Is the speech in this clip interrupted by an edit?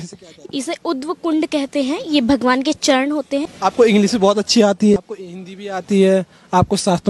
yes; 2 cuts; at 3.5 s, 5.0 s

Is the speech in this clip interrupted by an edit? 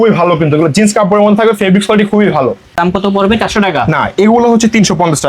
yes; 1 cut; at 2.8 s

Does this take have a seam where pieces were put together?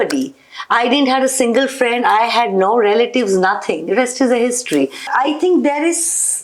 yes; 1 cut; at 5.1 s

